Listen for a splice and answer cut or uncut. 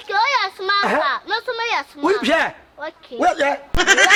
uncut